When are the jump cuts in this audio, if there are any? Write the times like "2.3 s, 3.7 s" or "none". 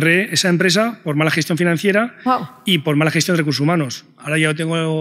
none